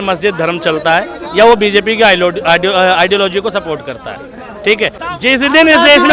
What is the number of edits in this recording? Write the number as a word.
one